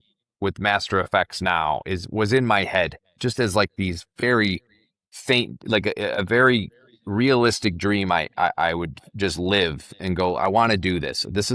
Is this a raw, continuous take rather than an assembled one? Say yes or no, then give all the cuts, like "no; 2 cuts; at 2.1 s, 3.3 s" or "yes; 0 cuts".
yes; 0 cuts